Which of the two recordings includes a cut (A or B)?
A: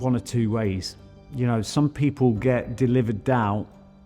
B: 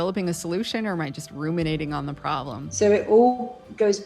B